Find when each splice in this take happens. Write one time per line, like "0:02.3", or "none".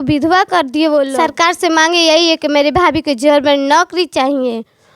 0:01.1